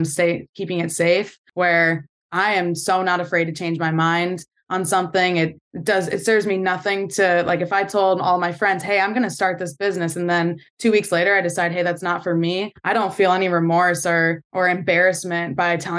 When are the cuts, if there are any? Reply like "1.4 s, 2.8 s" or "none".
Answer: 1.4 s, 5.7 s, 12.7 s, 14.4 s